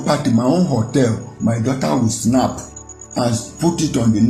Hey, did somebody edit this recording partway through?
no; 0 cuts

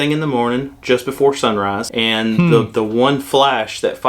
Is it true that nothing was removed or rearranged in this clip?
no; 1 cut; at 1.8 s

